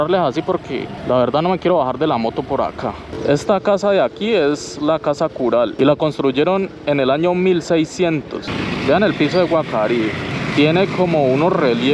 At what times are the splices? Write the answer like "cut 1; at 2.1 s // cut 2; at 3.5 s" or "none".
cut 1; at 0.9 s // cut 2; at 3.1 s // cut 3; at 5.7 s // cut 4; at 8.5 s // cut 5; at 10.3 s

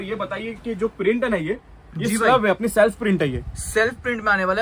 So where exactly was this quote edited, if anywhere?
none

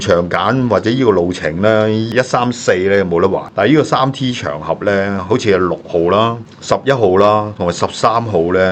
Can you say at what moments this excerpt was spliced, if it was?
none

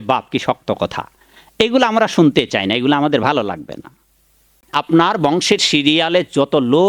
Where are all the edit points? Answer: cut 1; at 4.6 s

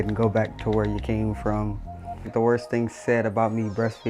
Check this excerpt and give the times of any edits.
cut 1; at 2.2 s

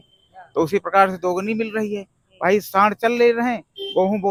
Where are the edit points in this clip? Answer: none

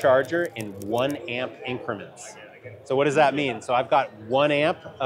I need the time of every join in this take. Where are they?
none

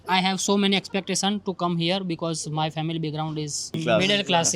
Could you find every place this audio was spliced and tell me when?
cut 1; at 3.6 s

